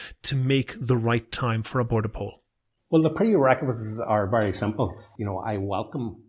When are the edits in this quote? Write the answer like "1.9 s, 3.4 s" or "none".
5.1 s